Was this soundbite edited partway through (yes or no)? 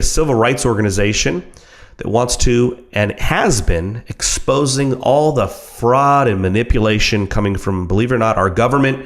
yes